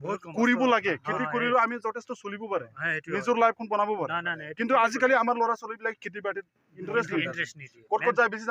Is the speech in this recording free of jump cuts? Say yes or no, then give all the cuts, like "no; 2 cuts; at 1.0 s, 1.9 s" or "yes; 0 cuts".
yes; 0 cuts